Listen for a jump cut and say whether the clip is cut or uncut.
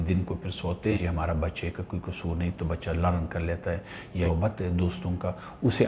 cut